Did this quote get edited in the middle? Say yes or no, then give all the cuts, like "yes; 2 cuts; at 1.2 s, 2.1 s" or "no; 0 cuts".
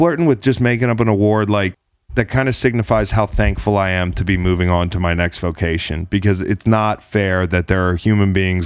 no; 0 cuts